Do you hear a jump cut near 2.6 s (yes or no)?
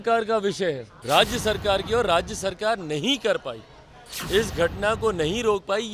no